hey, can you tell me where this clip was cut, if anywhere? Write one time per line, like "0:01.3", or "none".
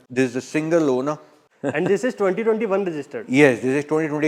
none